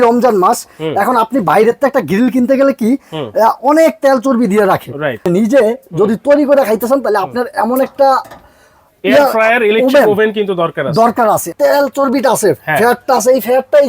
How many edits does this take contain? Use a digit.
2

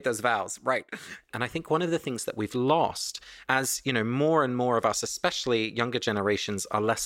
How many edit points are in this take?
1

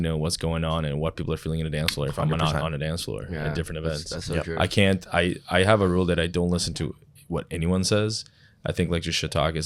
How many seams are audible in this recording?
0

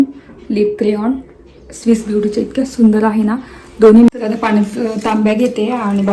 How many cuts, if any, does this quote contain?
1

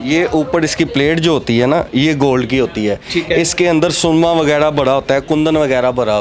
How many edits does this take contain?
0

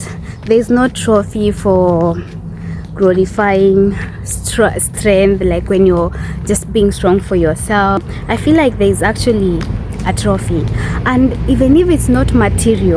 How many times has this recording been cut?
1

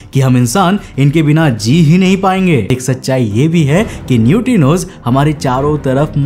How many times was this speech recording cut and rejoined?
1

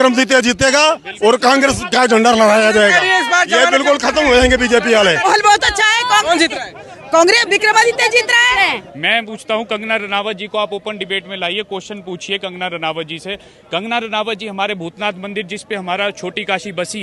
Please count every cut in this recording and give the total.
2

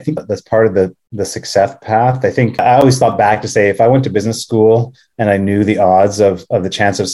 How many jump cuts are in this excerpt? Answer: 1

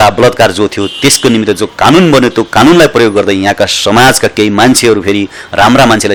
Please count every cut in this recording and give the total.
0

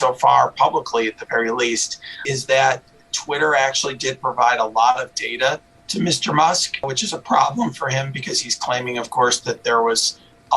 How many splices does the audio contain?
2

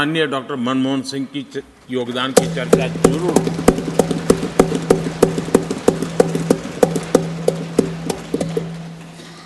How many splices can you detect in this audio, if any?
0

